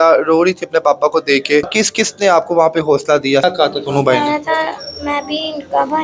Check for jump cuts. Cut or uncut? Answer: cut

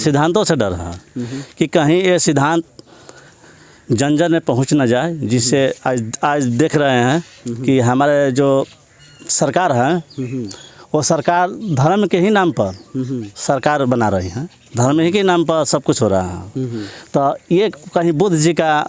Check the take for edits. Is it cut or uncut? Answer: uncut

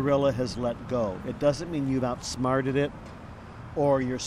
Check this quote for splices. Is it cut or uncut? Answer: uncut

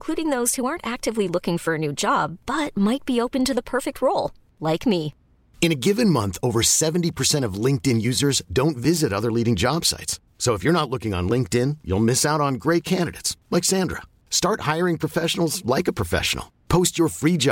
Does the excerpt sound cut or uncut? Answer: uncut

